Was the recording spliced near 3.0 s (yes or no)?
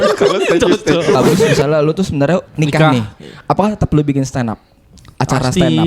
no